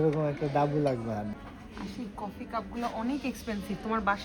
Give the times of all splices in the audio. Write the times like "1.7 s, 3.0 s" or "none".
1.3 s

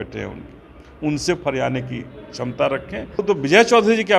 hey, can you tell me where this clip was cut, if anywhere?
3.2 s

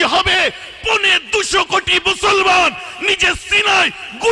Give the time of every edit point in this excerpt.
none

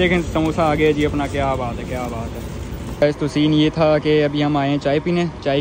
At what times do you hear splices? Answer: 3.0 s

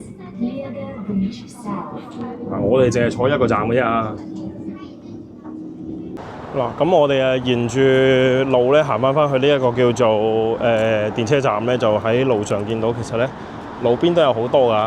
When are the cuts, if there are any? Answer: 6.2 s

